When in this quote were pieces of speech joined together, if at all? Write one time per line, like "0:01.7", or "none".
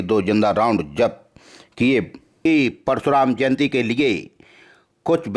0:02.2